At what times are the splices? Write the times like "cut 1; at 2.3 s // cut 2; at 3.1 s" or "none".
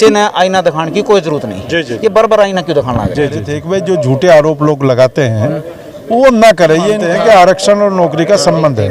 cut 1; at 3.6 s // cut 2; at 7.0 s